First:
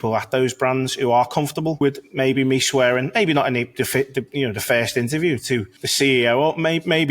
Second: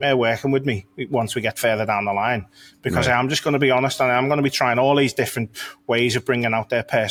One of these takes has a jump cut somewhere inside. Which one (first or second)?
first